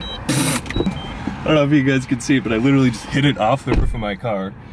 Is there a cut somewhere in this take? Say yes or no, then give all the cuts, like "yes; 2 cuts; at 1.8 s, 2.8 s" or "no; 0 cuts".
yes; 1 cut; at 0.9 s